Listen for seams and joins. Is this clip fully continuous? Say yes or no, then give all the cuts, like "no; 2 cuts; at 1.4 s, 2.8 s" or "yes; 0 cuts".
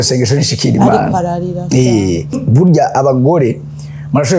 no; 1 cut; at 2.4 s